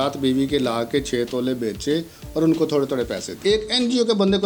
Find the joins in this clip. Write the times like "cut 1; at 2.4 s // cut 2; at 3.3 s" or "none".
cut 1; at 3.4 s